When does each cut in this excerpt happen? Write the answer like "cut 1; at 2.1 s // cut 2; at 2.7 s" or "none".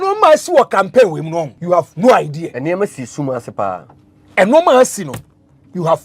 cut 1; at 1.5 s // cut 2; at 2.5 s